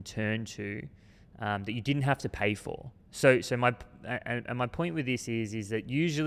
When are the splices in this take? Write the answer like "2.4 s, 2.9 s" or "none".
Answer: none